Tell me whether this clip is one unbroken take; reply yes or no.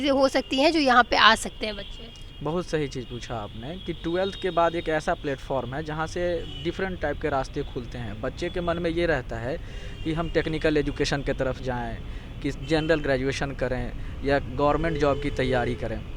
yes